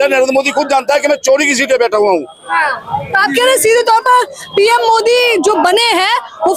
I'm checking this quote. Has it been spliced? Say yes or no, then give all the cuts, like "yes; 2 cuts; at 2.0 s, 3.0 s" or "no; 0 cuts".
no; 0 cuts